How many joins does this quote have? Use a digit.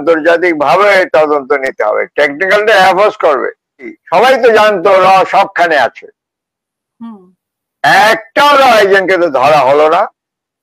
1